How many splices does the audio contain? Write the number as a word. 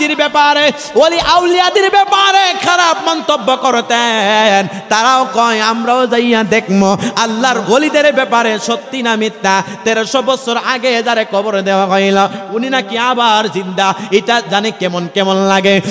zero